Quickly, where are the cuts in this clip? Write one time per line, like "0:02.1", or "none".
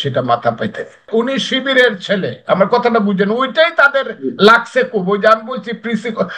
0:01.1